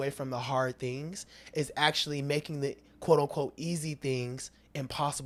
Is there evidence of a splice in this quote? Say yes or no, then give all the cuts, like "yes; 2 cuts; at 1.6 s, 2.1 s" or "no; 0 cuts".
no; 0 cuts